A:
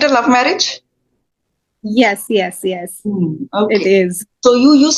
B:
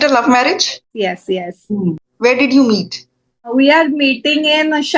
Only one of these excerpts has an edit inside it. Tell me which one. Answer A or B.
B